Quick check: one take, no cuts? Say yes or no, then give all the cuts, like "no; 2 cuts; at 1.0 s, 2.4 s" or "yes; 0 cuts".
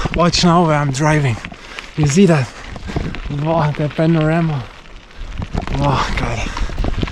yes; 0 cuts